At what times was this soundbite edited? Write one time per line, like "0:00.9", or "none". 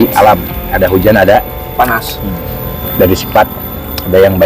0:02.8